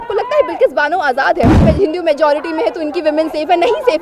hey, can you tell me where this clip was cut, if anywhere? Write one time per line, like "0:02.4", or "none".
0:01.6